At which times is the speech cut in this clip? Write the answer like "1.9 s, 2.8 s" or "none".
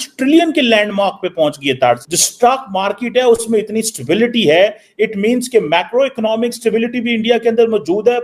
2.0 s